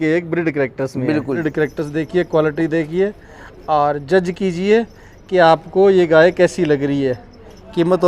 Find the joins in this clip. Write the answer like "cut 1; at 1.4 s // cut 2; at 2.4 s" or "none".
cut 1; at 1.4 s